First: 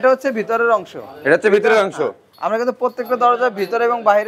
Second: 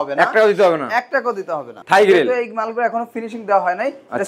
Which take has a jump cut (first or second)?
second